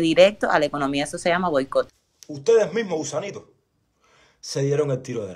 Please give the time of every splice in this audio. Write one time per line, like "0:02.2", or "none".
0:01.9